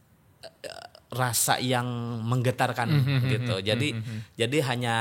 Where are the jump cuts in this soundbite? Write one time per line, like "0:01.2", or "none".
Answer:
none